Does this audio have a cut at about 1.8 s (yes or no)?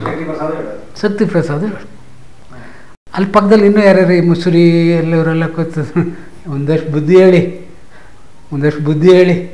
no